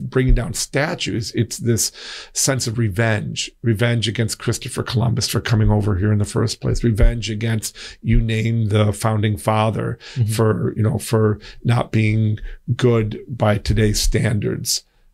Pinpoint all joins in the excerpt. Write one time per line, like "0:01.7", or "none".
none